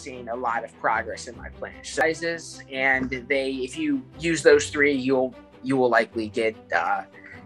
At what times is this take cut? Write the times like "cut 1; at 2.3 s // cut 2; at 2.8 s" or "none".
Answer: cut 1; at 2.0 s